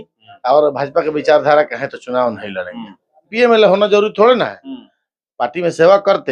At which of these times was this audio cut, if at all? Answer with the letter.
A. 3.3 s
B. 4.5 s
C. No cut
A